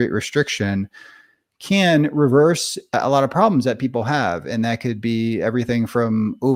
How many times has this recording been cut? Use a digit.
0